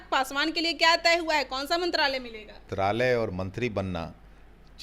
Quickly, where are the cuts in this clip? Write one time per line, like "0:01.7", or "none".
0:02.7